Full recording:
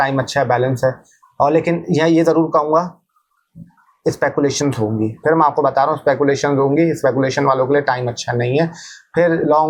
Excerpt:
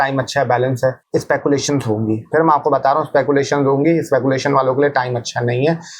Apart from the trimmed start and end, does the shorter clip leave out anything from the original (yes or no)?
yes